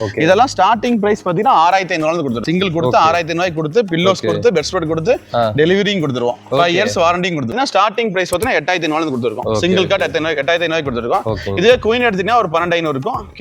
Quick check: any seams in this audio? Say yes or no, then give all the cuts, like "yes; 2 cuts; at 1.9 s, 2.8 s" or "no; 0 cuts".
yes; 1 cut; at 7.5 s